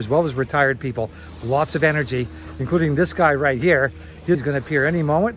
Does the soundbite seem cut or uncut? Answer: cut